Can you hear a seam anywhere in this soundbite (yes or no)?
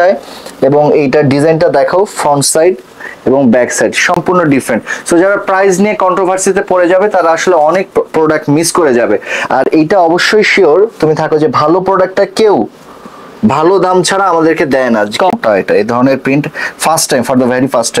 no